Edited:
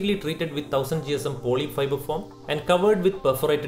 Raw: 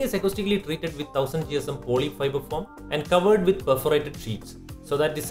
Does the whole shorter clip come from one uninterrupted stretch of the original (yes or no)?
yes